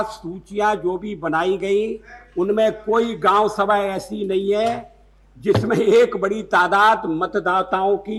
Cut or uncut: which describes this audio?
uncut